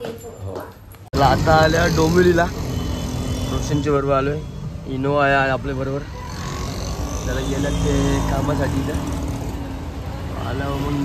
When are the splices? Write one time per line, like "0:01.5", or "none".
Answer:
0:00.9